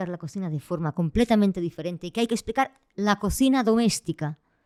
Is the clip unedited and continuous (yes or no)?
yes